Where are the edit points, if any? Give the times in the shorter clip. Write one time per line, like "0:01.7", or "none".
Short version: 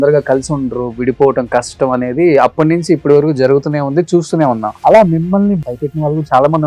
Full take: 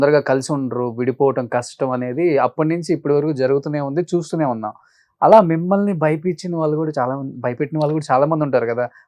0:04.7
0:05.6